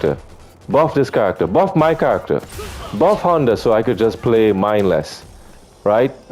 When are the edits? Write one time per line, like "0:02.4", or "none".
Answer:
none